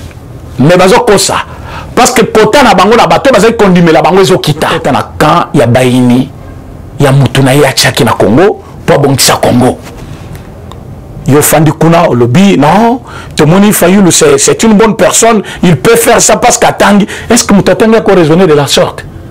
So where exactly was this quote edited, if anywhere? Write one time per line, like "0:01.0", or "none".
0:04.8